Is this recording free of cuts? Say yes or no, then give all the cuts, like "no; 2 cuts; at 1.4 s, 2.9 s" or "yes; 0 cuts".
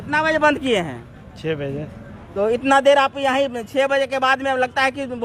yes; 0 cuts